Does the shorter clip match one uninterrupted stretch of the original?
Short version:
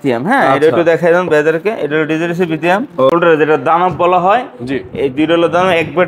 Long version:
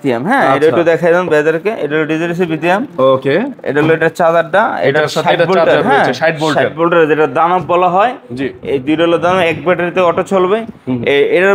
no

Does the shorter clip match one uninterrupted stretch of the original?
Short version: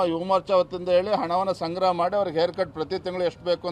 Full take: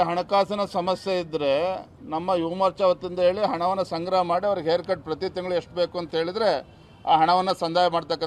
yes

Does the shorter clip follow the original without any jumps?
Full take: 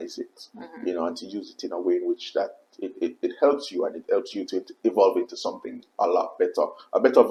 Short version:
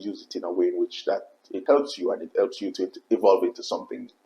no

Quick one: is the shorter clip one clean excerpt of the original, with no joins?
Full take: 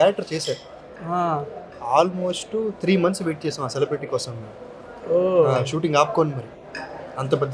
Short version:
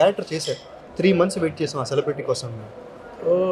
no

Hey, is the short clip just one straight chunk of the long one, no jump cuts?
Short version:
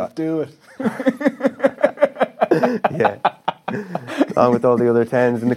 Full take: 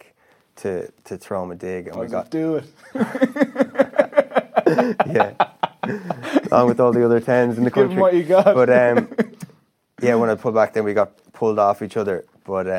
yes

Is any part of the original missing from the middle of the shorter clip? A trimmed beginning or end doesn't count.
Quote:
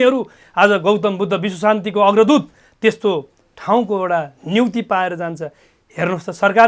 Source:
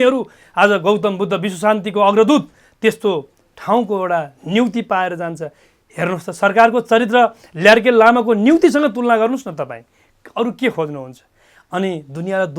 no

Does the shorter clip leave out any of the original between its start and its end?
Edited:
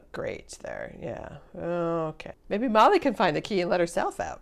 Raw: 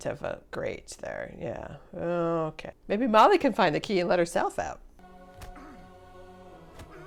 no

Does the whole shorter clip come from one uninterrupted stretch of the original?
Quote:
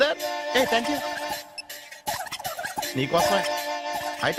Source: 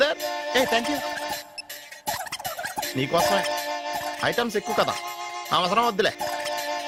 yes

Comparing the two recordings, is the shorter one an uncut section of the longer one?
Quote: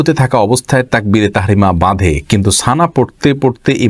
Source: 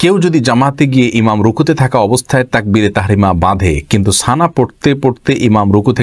yes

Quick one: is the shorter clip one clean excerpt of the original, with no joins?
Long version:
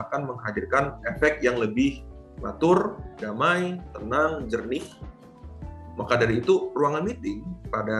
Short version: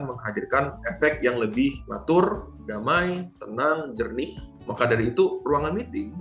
no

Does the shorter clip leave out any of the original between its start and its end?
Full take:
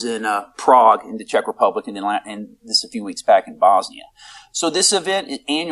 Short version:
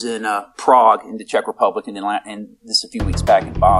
no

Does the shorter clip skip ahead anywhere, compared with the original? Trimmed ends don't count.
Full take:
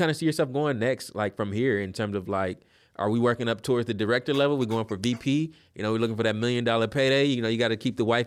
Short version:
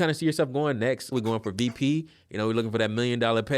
yes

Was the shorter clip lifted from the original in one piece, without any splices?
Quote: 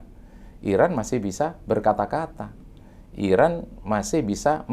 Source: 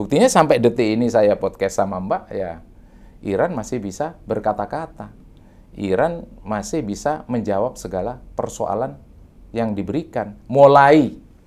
yes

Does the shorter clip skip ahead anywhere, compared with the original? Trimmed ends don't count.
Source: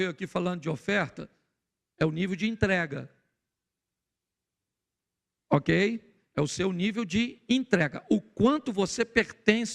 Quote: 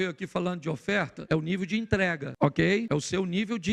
yes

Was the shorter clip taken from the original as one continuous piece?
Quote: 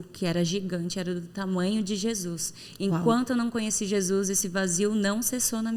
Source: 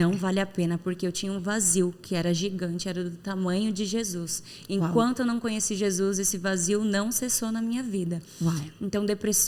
yes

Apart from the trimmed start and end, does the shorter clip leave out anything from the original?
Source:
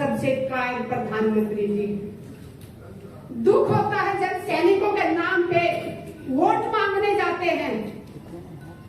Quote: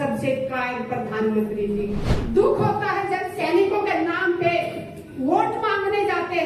yes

